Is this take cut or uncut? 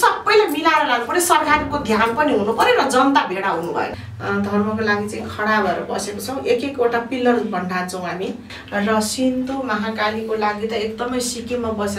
cut